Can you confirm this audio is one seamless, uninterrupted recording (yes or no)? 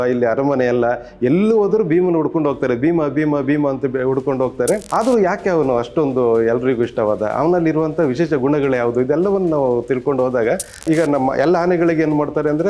no